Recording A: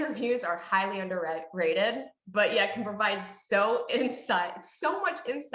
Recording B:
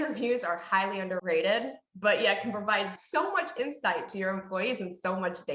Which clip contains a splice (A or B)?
B